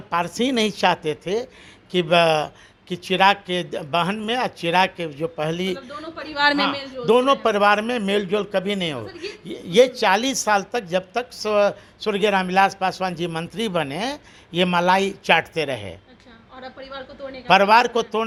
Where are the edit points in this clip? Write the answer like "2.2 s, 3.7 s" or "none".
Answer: none